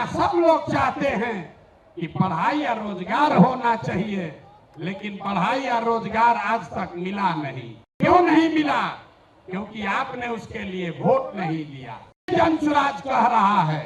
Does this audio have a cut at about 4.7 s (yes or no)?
no